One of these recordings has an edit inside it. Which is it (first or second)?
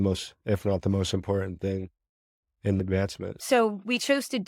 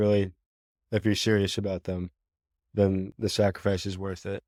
first